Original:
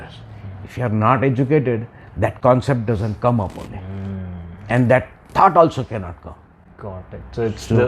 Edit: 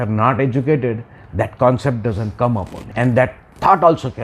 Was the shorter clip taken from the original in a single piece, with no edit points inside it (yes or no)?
no